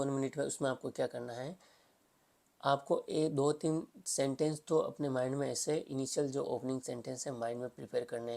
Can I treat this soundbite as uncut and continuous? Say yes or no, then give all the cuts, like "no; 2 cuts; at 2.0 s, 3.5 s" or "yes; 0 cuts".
yes; 0 cuts